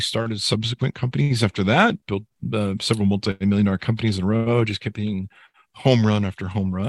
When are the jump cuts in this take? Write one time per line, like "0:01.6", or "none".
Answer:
none